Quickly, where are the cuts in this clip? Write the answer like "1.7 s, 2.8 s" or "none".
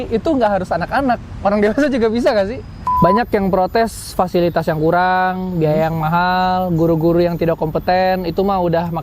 2.8 s

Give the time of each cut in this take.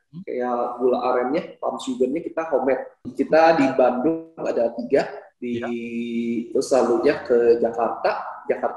3.0 s

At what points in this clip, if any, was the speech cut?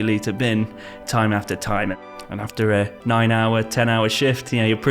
1.9 s

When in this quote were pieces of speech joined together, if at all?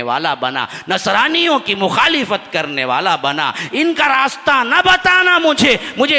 none

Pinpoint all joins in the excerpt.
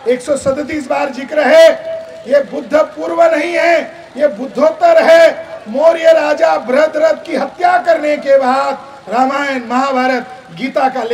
none

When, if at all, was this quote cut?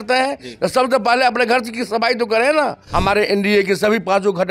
2.8 s

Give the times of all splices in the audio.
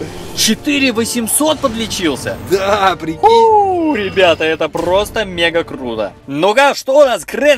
6.2 s

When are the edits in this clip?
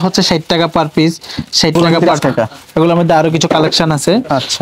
1.7 s

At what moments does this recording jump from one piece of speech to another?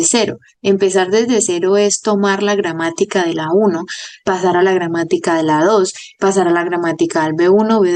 none

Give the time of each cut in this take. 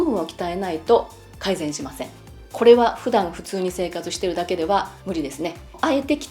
2.5 s, 5.3 s

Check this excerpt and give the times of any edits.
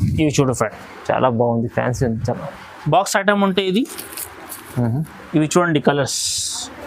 none

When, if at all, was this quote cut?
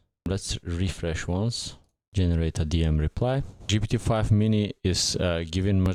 none

